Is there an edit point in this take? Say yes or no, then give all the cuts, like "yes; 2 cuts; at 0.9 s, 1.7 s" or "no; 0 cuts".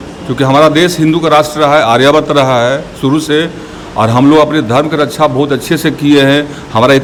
no; 0 cuts